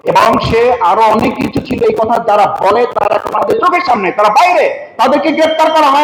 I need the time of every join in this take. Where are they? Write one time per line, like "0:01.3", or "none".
none